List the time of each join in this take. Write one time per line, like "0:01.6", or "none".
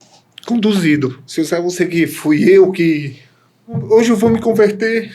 0:01.2
0:03.8